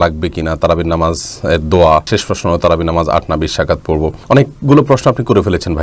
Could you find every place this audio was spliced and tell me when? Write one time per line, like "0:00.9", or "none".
none